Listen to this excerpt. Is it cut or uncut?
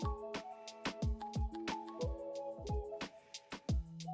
uncut